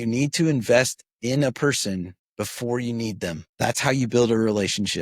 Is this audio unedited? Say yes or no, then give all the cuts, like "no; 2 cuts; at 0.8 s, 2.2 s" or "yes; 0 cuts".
no; 2 cuts; at 2.2 s, 3.5 s